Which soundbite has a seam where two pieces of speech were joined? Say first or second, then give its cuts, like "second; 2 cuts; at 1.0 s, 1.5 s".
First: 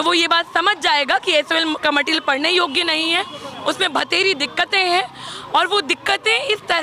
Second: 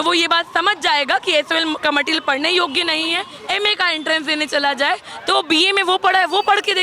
second; 1 cut; at 3.3 s